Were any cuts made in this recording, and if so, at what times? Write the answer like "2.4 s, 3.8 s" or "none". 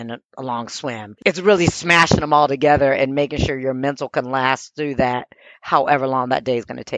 none